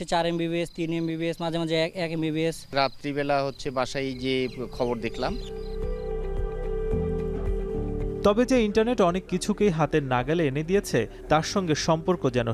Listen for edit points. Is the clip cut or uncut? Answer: uncut